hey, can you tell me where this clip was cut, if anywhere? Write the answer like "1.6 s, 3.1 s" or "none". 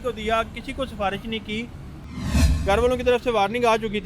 2.4 s